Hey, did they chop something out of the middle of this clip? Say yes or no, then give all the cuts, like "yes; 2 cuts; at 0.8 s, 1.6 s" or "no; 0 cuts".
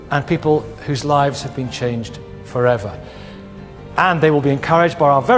no; 0 cuts